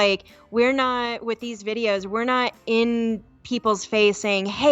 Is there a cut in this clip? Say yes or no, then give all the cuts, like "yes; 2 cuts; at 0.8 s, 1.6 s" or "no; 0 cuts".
no; 0 cuts